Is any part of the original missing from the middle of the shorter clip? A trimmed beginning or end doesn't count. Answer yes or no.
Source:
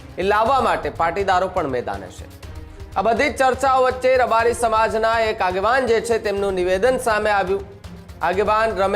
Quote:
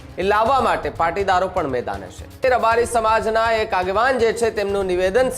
yes